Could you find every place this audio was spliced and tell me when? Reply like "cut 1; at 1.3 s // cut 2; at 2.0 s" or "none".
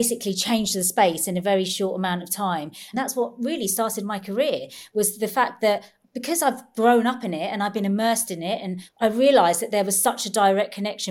cut 1; at 2.8 s // cut 2; at 8.8 s